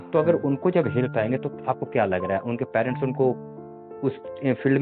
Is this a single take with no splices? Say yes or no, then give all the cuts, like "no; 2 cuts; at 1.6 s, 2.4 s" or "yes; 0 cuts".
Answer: yes; 0 cuts